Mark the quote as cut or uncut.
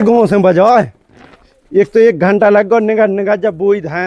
uncut